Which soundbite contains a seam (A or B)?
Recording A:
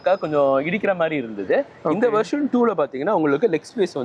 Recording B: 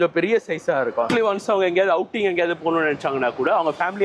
B